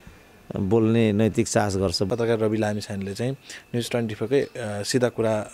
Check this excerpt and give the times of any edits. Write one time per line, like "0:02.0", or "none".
0:02.1